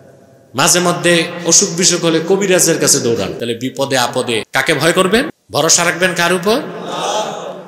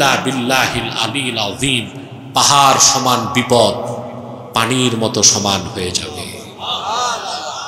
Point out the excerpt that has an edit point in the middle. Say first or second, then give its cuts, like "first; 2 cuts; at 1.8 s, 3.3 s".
first; 3 cuts; at 3.4 s, 4.5 s, 5.4 s